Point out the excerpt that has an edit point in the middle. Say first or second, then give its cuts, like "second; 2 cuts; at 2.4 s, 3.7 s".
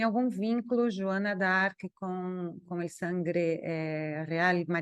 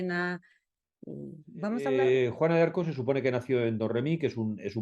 second; 1 cut; at 1.8 s